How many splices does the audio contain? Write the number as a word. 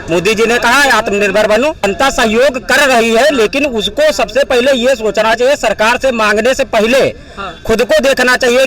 one